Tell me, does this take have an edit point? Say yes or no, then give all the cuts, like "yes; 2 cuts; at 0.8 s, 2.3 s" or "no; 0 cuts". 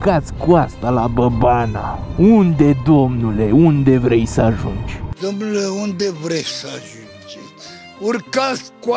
no; 0 cuts